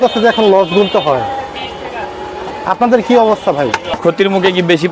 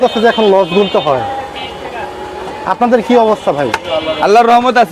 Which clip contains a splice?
first; 1 cut; at 3.9 s

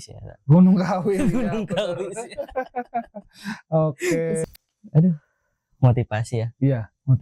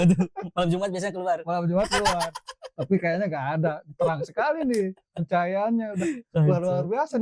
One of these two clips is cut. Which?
first; 1 cut; at 4.4 s

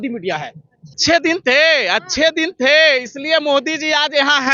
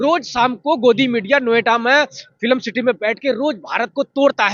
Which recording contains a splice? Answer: first; 1 cut; at 1.0 s

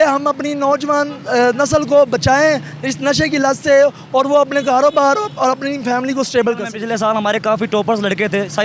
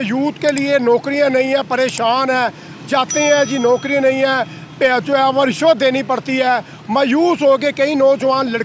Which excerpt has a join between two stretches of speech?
first; 1 cut; at 6.8 s

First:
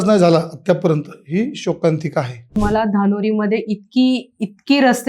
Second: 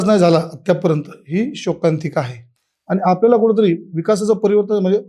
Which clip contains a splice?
first; 1 cut; at 2.6 s

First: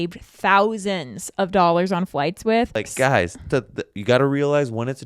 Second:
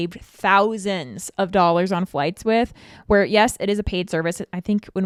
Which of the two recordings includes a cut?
first; 1 cut; at 2.8 s

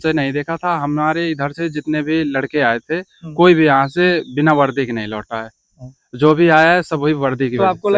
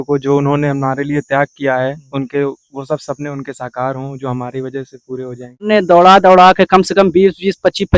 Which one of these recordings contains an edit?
second; 1 cut; at 5.6 s

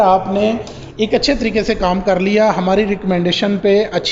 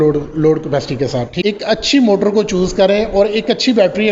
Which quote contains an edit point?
second; 1 cut; at 1.3 s

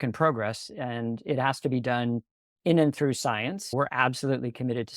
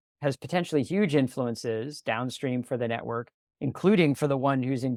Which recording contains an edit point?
first; 1 cut; at 3.7 s

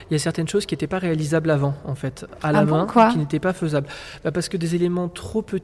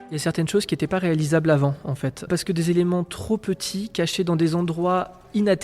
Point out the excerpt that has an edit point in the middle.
second; 1 cut; at 2.2 s

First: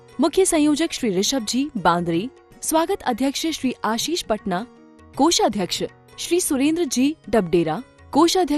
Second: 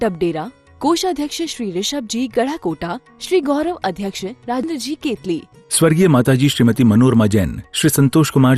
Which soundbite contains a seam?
second; 1 cut; at 4.7 s

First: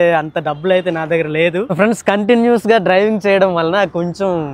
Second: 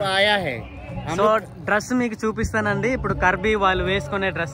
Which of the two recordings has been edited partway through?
first; 1 cut; at 1.7 s

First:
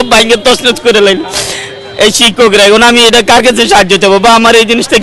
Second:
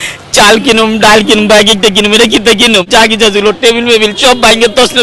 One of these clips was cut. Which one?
second; 1 cut; at 2.9 s

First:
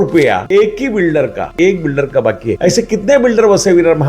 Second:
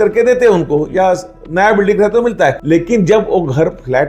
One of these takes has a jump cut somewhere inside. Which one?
first; 1 cut; at 1.5 s

